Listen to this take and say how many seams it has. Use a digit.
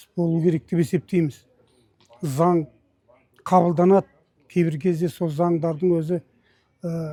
0